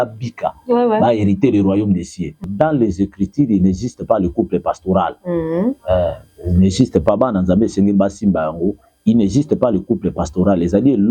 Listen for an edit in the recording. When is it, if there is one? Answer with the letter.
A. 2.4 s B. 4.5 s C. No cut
A